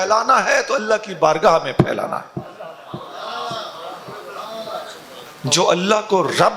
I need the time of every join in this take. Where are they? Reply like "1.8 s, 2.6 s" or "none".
5.3 s